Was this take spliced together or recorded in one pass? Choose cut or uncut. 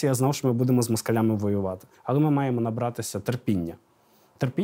cut